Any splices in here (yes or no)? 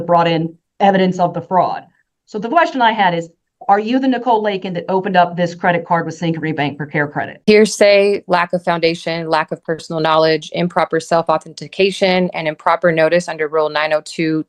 yes